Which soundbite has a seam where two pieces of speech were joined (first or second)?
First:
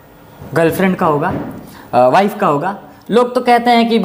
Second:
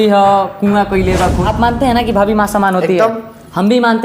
second